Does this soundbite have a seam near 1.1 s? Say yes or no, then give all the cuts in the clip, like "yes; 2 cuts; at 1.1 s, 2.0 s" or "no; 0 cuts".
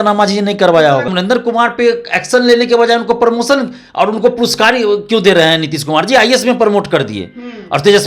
yes; 1 cut; at 1.1 s